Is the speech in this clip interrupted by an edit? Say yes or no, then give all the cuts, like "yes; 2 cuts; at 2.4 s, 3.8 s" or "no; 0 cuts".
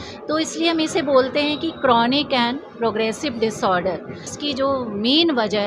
yes; 1 cut; at 4.3 s